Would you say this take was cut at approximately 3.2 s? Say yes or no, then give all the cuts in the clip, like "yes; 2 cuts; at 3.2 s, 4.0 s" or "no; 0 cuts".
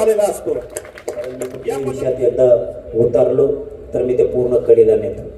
no; 1 cut; at 1.6 s